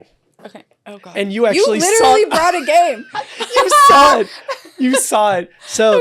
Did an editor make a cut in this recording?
no; 0 cuts

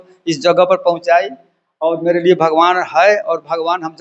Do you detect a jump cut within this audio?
no; 0 cuts

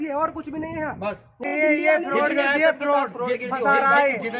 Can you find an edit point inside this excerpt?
yes; 1 cut; at 1.4 s

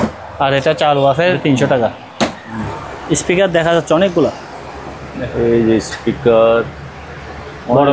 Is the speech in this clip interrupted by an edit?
yes; 2 cuts; at 1.4 s, 2.6 s

